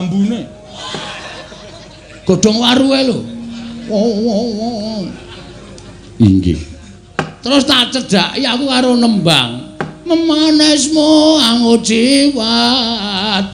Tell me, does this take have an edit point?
no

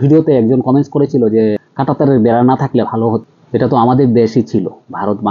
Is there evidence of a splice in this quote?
yes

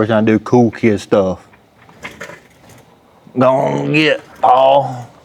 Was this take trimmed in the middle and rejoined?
no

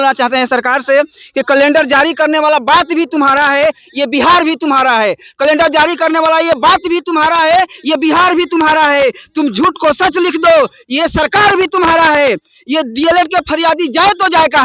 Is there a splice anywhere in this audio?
no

